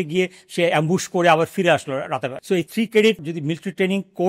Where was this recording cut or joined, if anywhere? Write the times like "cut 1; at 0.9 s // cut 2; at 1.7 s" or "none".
cut 1; at 2.6 s // cut 2; at 3.3 s